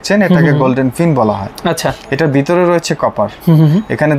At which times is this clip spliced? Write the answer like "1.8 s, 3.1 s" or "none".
none